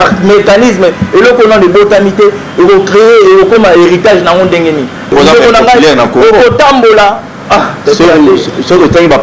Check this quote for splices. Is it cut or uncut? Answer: uncut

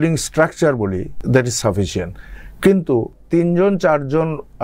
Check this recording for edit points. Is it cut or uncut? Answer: cut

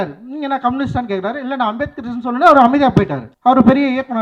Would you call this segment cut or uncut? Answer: cut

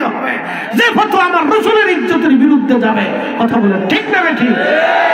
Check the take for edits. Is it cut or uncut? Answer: uncut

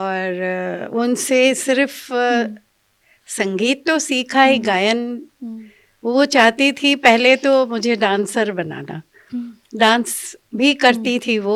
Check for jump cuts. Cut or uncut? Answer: uncut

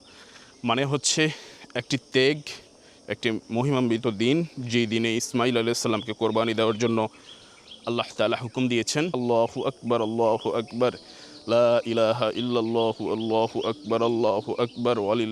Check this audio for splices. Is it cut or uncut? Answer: uncut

